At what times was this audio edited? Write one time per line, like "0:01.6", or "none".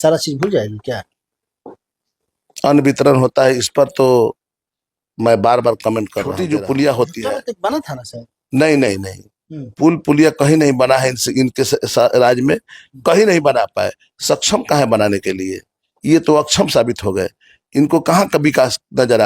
0:06.4